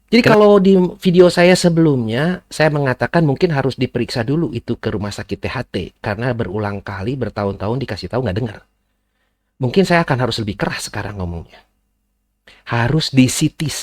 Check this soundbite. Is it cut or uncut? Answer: uncut